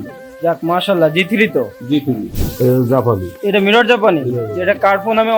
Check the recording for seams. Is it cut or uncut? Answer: cut